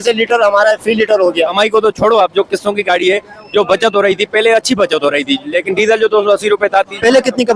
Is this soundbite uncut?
no; 1 cut; at 1.5 s

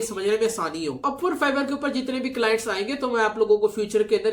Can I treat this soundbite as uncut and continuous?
yes; 0 cuts

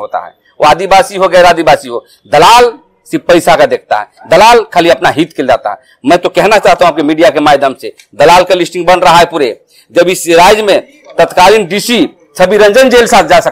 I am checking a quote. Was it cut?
no; 0 cuts

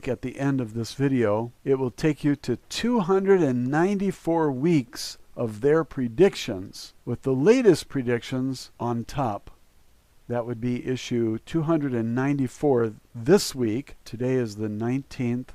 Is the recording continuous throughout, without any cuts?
yes; 0 cuts

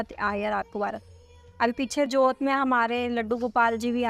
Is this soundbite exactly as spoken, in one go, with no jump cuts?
yes; 0 cuts

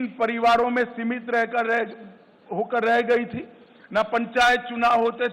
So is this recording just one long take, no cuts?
yes; 0 cuts

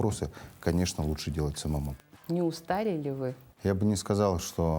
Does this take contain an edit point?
yes; 2 cuts; at 1.9 s, 3.5 s

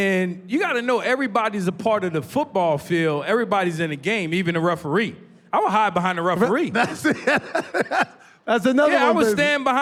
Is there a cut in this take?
no; 0 cuts

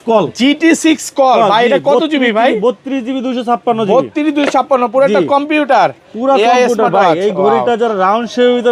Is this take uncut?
yes; 0 cuts

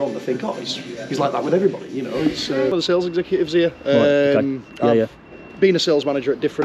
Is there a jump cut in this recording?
yes; 1 cut; at 2.7 s

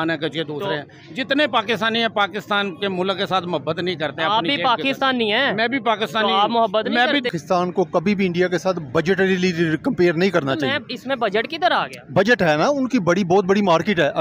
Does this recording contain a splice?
yes; 1 cut; at 7.4 s

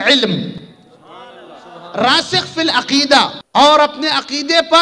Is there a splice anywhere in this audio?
yes; 1 cut; at 3.4 s

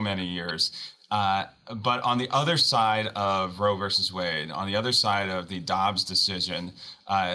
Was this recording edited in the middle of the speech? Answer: no; 0 cuts

